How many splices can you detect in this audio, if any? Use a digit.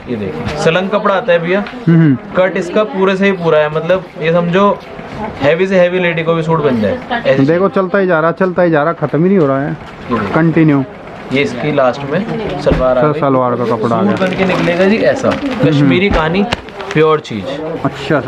0